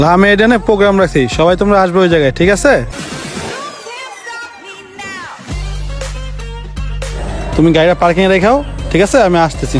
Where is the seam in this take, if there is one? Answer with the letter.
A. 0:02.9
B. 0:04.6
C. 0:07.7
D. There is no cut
A